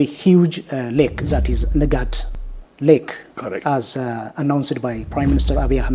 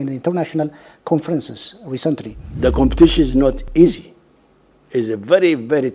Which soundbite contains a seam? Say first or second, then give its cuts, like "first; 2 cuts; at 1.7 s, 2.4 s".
second; 1 cut; at 2.4 s